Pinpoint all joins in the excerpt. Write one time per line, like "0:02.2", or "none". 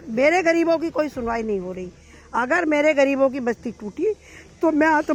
none